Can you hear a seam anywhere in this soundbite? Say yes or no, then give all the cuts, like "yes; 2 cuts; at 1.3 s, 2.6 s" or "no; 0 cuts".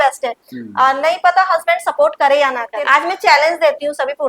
yes; 1 cut; at 2.7 s